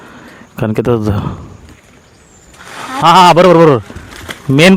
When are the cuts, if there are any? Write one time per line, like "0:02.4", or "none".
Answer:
none